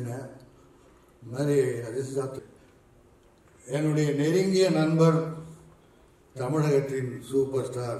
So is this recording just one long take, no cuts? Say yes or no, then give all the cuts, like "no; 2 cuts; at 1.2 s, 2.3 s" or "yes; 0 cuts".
no; 1 cut; at 2.4 s